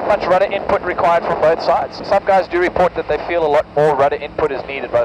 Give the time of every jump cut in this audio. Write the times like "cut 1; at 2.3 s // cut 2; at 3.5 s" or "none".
cut 1; at 2.0 s